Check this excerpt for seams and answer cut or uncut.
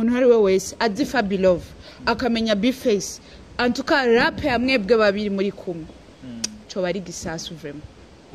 uncut